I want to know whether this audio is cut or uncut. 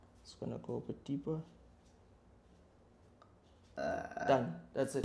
uncut